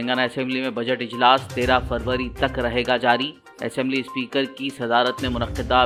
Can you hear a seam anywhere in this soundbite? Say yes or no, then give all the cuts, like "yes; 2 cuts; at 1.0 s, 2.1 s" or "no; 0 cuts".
no; 0 cuts